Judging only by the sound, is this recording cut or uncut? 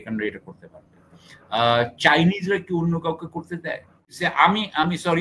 cut